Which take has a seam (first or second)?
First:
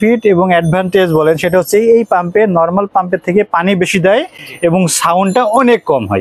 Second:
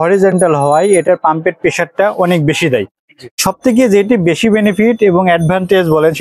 second